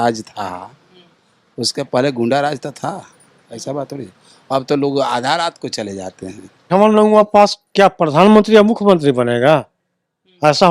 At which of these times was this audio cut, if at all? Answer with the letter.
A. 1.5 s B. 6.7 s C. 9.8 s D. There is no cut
B